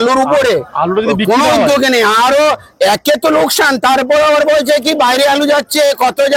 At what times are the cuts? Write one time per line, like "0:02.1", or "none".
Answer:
none